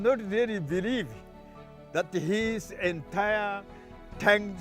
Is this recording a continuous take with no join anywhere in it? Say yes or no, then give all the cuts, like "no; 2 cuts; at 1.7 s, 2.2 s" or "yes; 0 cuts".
yes; 0 cuts